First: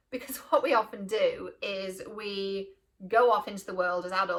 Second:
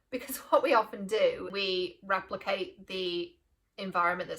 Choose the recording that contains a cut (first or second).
second